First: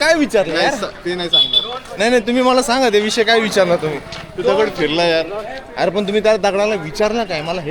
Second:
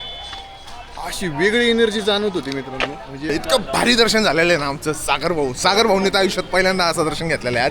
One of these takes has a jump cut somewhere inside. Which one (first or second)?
second